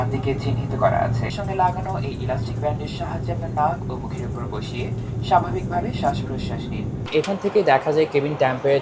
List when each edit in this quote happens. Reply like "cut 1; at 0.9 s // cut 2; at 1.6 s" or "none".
cut 1; at 1.3 s // cut 2; at 7.1 s